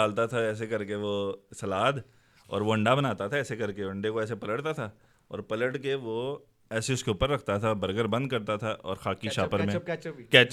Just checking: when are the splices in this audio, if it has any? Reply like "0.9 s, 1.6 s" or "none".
none